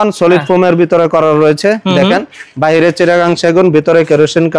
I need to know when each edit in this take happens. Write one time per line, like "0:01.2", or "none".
none